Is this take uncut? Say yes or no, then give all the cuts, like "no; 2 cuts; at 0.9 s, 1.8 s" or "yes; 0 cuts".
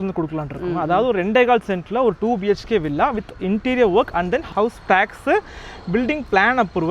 yes; 0 cuts